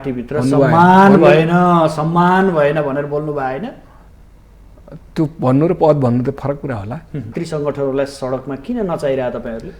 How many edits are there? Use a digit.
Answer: 1